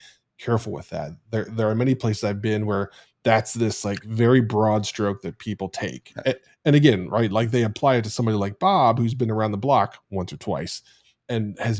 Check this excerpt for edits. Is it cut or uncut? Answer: uncut